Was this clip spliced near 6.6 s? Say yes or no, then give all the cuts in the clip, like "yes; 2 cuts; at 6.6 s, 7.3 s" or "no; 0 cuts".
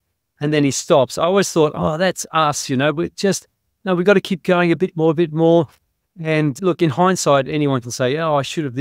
yes; 1 cut; at 6.6 s